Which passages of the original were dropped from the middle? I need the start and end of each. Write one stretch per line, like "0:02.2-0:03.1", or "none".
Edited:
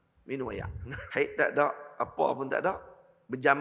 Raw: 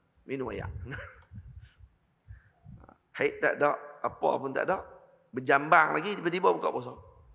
0:01.0-0:03.1